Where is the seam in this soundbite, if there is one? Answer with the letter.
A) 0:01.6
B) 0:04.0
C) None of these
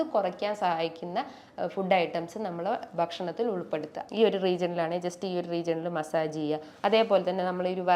B